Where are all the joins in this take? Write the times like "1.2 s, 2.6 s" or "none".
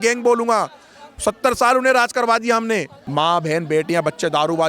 3.0 s